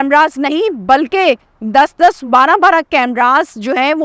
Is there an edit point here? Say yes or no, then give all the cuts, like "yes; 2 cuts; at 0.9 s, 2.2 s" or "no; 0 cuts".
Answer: no; 0 cuts